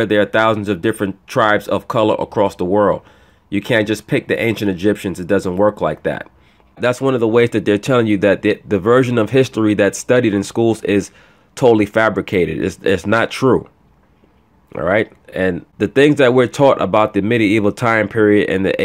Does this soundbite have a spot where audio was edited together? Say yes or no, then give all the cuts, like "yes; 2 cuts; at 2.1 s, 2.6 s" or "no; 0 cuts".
yes; 2 cuts; at 6.8 s, 15.7 s